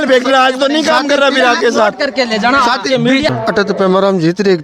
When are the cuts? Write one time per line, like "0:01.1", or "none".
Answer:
0:03.3

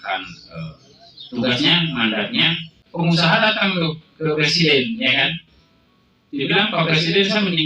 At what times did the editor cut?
0:02.8

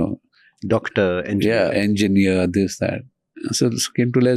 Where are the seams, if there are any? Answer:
none

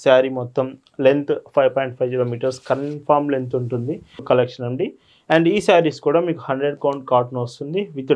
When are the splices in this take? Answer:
0:04.2

